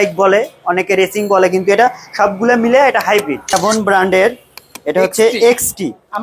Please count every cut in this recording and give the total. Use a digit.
1